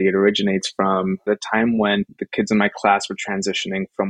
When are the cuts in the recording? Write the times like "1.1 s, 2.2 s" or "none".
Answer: 1.3 s, 2.2 s

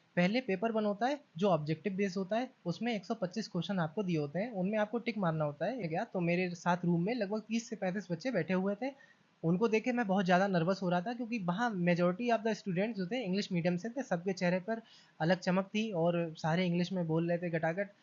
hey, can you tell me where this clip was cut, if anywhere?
5.9 s

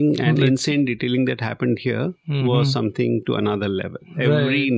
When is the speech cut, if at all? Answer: none

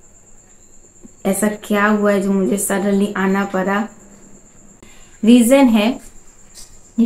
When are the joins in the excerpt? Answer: 5.0 s

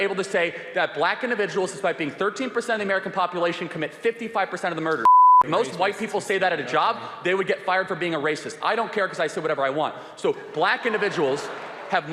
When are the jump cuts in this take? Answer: none

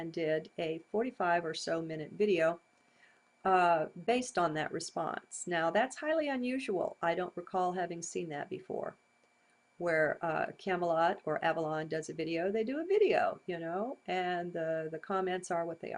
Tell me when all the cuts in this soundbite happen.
none

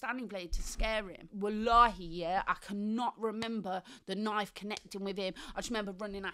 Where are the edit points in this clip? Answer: 1.2 s

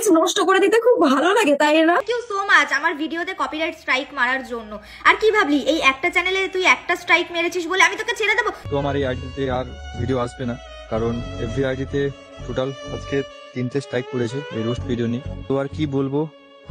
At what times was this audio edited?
none

